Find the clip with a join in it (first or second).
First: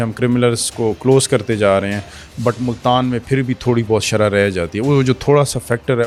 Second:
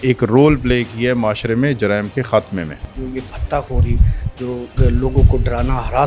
second